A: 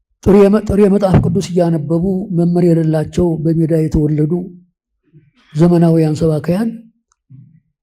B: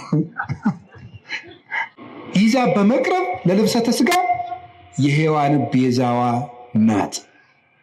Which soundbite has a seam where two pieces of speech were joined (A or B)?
B